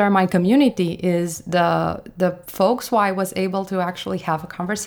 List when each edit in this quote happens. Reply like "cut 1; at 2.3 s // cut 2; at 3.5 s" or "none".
none